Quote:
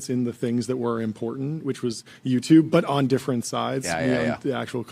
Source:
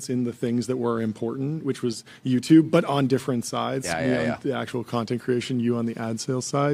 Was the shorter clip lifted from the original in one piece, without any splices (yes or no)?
yes